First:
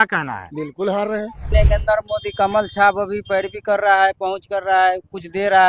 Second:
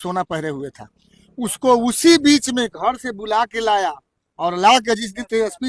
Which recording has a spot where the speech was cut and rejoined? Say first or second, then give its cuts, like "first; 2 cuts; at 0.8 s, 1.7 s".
first; 1 cut; at 1.5 s